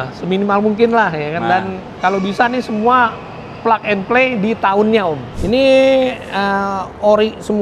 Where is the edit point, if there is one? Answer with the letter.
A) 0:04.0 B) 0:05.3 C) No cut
B